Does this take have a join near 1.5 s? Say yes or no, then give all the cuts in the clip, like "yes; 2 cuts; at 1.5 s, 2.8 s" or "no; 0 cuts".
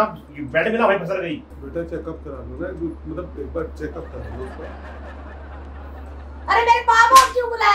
yes; 1 cut; at 1.5 s